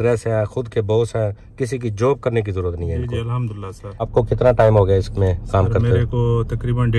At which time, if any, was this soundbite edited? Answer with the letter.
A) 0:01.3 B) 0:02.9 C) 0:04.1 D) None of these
C